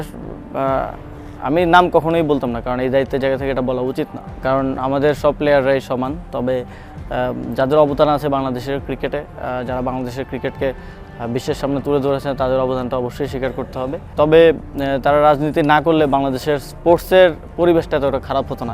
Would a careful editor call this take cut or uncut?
uncut